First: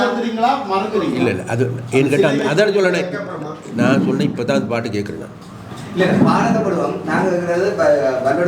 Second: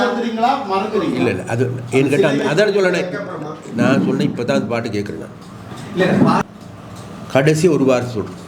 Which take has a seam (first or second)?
second